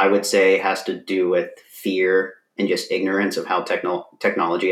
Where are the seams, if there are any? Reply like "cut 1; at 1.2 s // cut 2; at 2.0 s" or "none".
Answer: none